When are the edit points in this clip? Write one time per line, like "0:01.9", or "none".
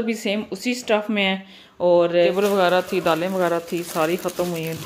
0:02.3